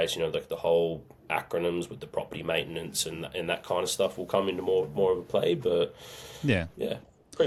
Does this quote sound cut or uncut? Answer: uncut